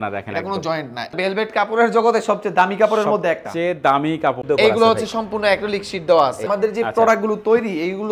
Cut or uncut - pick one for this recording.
cut